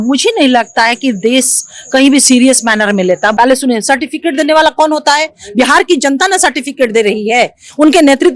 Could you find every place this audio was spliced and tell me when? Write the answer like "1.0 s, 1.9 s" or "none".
3.3 s